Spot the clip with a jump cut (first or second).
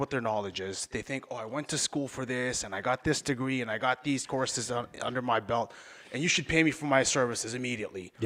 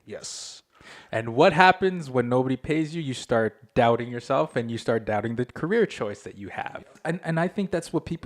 second